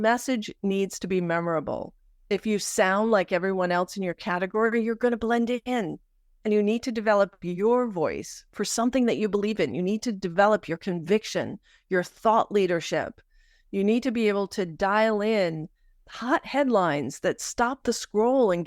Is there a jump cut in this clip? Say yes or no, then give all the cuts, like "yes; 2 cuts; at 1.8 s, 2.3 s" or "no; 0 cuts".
no; 0 cuts